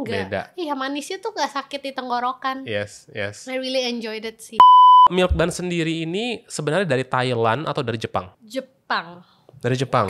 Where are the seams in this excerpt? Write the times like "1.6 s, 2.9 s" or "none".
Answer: 4.5 s, 5.1 s